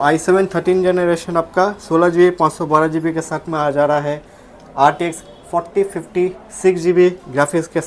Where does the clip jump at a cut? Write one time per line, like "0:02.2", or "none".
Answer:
none